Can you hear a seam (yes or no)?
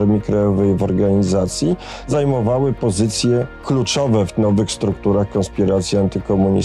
yes